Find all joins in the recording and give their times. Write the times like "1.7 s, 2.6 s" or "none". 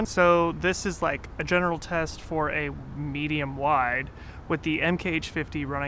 none